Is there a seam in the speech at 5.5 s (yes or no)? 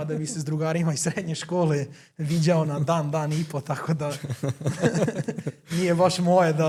no